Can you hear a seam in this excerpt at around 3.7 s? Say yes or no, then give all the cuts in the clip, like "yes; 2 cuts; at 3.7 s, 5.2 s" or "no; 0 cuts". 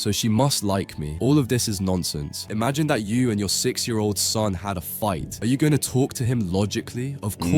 no; 3 cuts; at 1.0 s, 2.4 s, 5.3 s